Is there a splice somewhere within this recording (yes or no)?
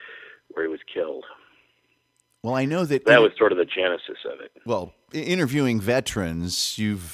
no